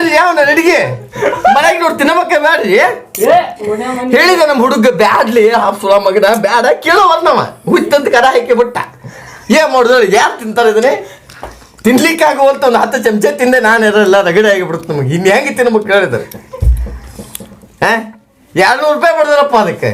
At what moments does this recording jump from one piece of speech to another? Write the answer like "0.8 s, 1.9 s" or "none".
1.3 s